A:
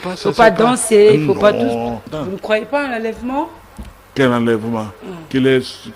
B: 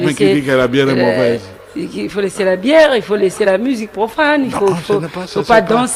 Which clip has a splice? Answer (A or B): A